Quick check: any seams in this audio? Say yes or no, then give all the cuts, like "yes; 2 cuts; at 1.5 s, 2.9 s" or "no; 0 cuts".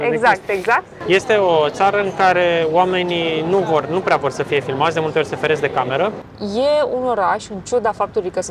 yes; 2 cuts; at 0.9 s, 6.3 s